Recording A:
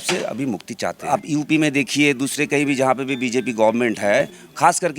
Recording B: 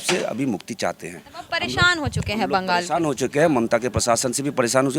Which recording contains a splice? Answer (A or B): A